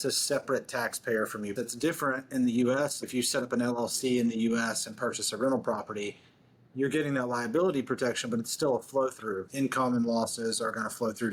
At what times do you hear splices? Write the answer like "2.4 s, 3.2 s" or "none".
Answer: 1.5 s, 3.0 s, 9.4 s